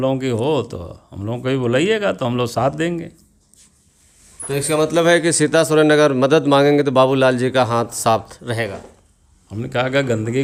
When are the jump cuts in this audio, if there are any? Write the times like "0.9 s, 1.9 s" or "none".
none

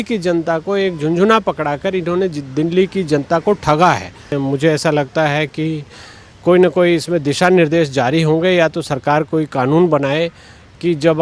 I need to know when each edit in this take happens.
4.4 s

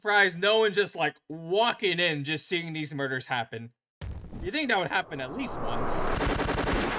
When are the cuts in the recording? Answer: none

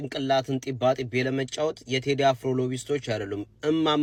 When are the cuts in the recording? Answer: none

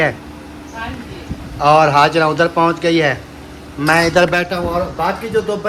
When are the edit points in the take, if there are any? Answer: none

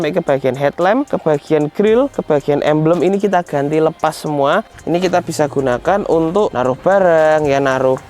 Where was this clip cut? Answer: 1.1 s, 2.2 s, 4.7 s, 6.5 s

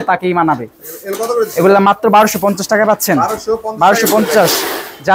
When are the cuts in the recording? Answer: none

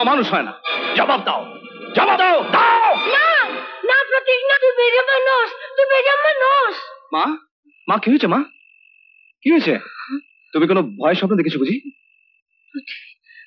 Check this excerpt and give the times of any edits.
none

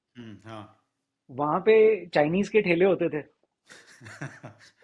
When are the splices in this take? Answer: none

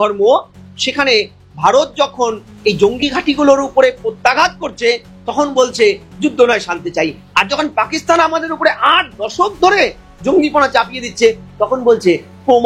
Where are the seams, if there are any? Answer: none

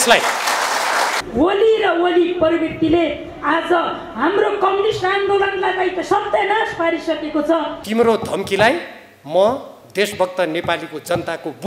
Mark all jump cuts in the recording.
1.2 s, 7.8 s

